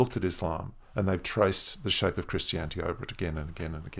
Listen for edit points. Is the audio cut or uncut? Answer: uncut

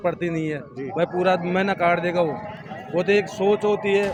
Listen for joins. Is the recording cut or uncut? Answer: uncut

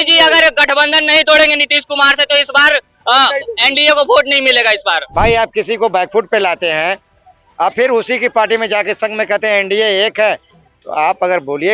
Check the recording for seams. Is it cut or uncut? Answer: cut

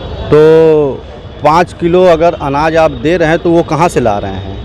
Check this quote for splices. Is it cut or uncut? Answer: uncut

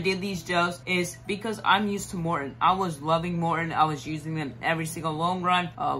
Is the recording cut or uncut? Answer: uncut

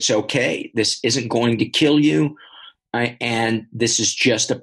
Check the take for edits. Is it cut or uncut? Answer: uncut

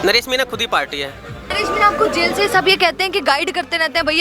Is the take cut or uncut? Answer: cut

